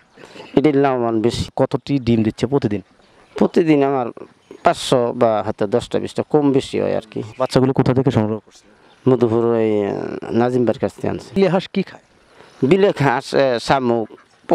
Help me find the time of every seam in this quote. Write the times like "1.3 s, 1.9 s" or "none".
1.5 s, 7.3 s, 11.4 s